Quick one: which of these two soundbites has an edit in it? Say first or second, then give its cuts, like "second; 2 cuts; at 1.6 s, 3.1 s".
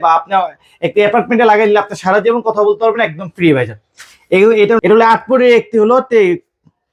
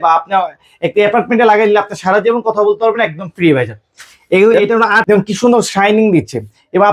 second; 1 cut; at 4.8 s